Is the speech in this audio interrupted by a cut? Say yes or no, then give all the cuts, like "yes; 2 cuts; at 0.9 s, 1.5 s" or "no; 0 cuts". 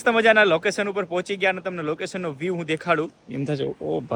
no; 0 cuts